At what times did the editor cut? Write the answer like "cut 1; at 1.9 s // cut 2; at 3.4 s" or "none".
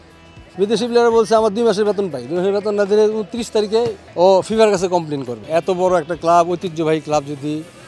cut 1; at 4.0 s // cut 2; at 5.3 s